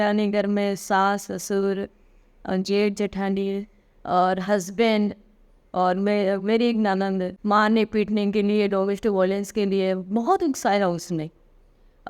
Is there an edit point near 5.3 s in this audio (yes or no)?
no